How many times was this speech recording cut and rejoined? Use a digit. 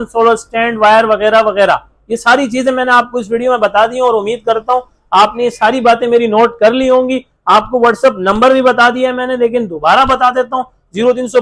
0